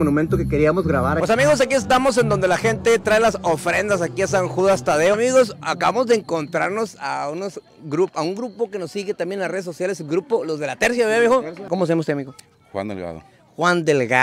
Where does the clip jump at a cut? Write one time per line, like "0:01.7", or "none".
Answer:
0:01.2
0:05.2
0:11.7